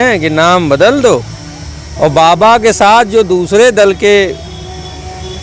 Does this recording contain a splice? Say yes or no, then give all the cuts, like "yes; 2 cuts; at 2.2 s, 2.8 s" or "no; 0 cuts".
no; 0 cuts